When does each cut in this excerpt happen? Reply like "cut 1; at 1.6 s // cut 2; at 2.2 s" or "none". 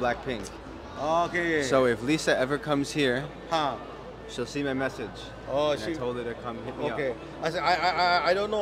none